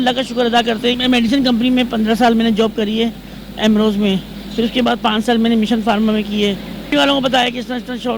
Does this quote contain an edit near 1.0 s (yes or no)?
yes